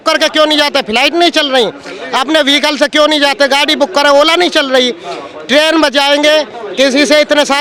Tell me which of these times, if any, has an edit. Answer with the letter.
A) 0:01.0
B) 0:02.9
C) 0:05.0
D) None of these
D